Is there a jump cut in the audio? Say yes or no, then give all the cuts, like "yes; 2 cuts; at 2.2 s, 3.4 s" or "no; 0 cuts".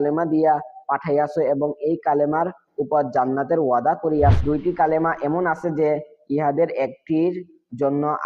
yes; 1 cut; at 4.4 s